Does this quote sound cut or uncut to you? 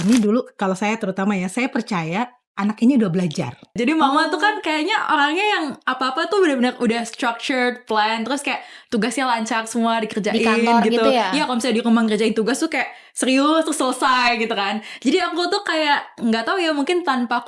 cut